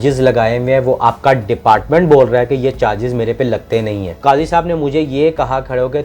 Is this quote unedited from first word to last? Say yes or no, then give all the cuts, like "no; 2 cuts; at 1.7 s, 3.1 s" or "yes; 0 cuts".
no; 1 cut; at 4.2 s